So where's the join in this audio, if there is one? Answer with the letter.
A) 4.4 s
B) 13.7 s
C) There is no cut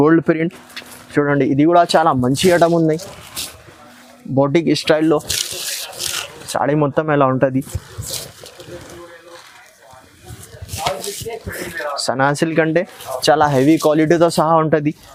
C